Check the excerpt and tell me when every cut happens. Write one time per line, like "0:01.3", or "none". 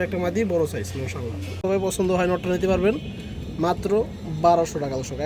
0:01.9